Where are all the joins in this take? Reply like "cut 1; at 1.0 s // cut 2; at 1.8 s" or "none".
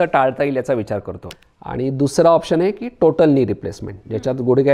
cut 1; at 1.1 s

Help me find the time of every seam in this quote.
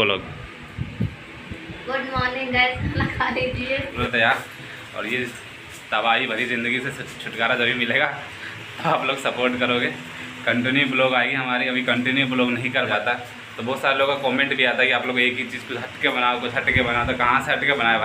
cut 1; at 4.0 s // cut 2; at 12.9 s

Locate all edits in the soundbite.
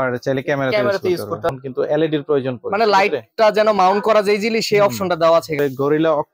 cut 1; at 1.5 s // cut 2; at 5.6 s

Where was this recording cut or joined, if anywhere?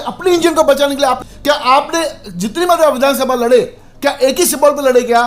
cut 1; at 1.2 s

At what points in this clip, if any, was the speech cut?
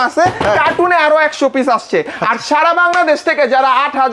none

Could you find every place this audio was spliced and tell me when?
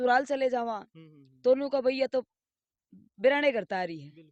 none

